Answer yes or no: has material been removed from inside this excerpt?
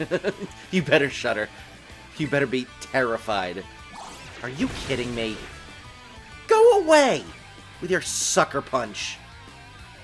no